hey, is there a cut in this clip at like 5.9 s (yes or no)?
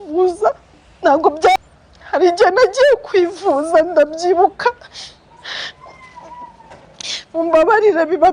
no